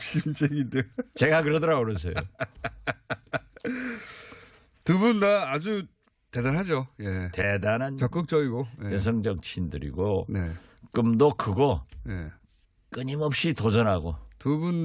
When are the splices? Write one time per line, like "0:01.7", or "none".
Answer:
0:08.8